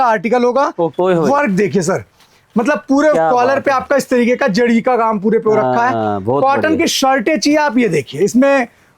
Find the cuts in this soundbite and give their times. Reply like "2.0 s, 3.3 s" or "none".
0.9 s